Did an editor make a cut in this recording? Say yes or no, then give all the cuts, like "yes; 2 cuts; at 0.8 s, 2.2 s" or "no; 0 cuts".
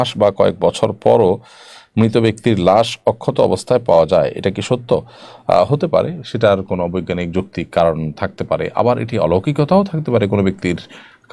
no; 0 cuts